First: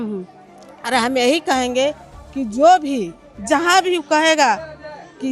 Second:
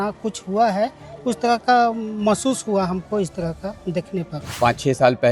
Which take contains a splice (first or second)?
second